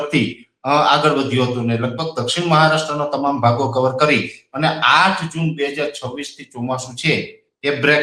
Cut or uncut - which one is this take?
uncut